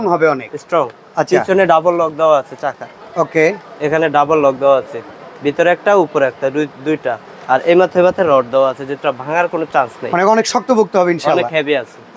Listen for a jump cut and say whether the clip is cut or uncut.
uncut